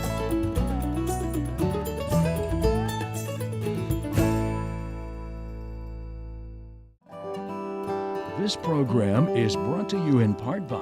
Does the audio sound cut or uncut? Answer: cut